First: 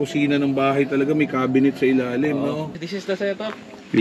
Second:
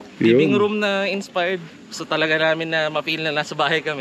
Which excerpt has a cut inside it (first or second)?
first